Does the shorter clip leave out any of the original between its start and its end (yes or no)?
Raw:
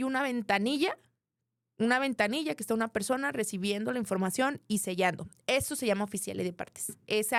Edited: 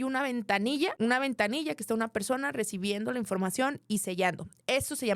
yes